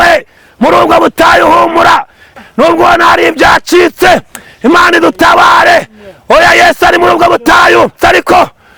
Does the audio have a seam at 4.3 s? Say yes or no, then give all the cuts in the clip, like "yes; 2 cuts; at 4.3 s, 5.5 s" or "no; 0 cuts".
no; 2 cuts; at 2.2 s, 8.0 s